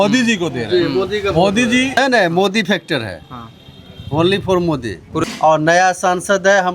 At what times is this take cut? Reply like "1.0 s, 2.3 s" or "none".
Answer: 2.0 s, 5.2 s